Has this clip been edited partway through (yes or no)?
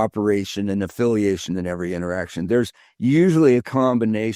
no